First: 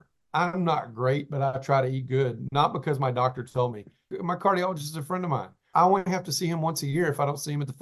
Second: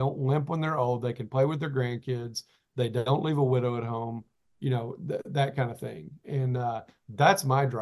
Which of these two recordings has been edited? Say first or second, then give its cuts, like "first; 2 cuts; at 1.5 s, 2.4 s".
first; 2 cuts; at 4.1 s, 5.7 s